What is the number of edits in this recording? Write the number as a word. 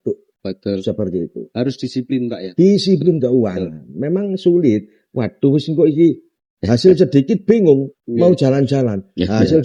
zero